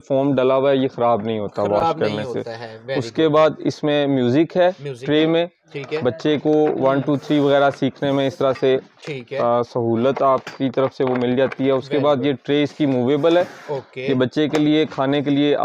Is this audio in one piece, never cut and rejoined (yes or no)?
yes